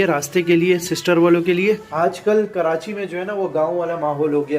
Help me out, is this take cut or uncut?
cut